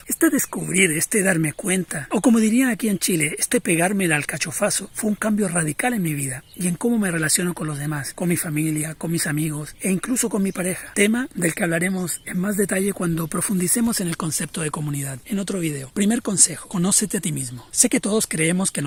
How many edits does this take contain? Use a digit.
0